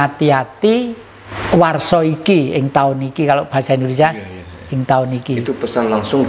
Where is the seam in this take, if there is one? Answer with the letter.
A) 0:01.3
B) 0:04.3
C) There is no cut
A